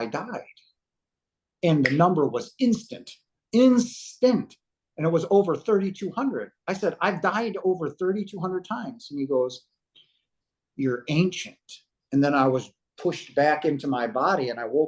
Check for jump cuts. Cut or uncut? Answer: uncut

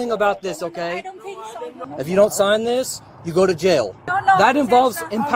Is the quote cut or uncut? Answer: cut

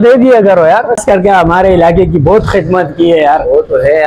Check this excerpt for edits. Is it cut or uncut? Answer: cut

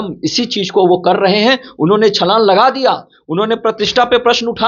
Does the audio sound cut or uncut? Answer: uncut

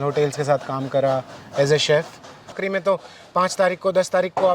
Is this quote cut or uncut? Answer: cut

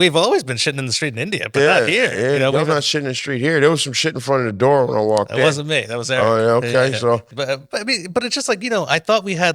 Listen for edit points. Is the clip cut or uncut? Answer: cut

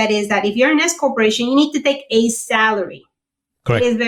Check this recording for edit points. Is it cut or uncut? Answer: uncut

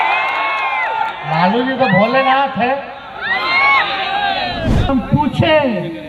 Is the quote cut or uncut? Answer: cut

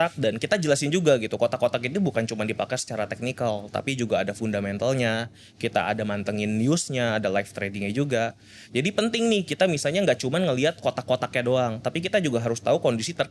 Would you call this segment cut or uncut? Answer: uncut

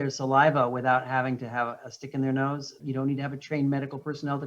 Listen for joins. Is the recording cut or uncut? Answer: cut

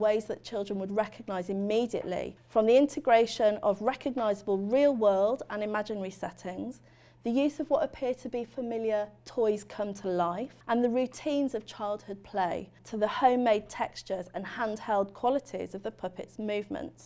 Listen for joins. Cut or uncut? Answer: cut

